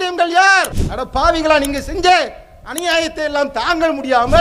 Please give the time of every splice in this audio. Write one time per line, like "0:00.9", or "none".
none

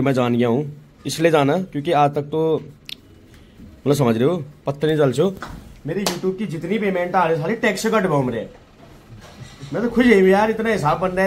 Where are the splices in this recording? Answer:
none

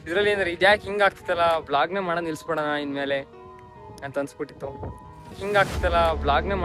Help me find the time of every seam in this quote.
0:05.4

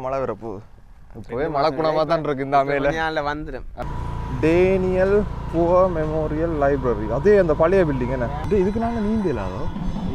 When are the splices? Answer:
0:03.6
0:08.4

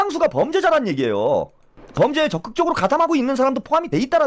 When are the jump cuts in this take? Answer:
none

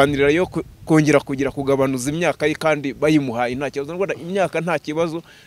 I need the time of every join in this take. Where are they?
none

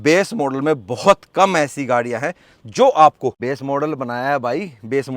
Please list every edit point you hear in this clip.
0:03.4

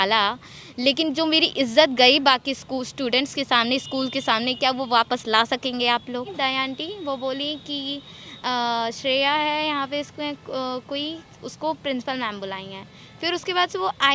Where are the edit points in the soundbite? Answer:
0:06.3

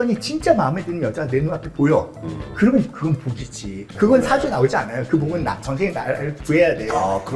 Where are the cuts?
0:03.9

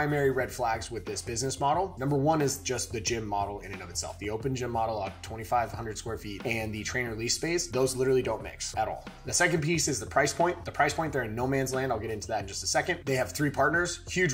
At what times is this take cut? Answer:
0:01.9

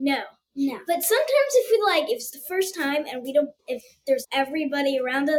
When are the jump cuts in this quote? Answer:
0:04.2

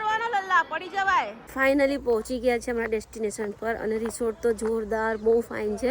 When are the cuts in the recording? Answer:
0:01.4

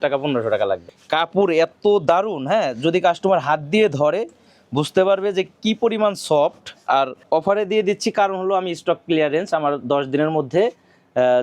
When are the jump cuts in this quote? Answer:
0:00.9
0:07.2

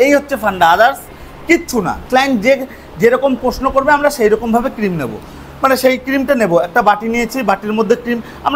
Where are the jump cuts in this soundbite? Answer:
0:02.0

